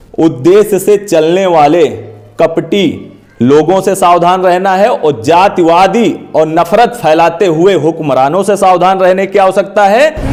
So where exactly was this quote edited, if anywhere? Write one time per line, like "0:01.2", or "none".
none